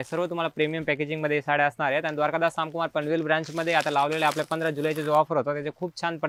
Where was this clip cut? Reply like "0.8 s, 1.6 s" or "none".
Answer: none